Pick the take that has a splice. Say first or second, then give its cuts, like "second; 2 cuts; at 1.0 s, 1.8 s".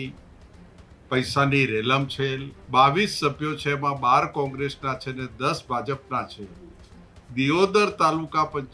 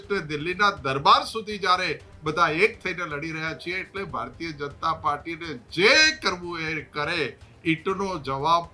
first; 1 cut; at 2.5 s